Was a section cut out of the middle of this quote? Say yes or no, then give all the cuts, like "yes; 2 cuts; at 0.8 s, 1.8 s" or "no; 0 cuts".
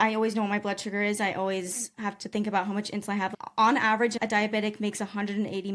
yes; 2 cuts; at 3.3 s, 4.2 s